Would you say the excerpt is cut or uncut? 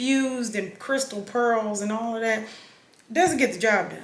uncut